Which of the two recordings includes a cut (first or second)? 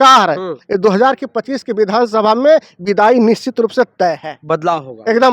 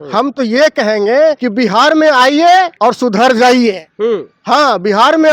second